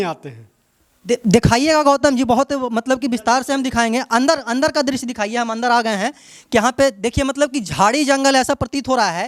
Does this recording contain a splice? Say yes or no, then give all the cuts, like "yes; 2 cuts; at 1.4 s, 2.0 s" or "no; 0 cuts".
no; 0 cuts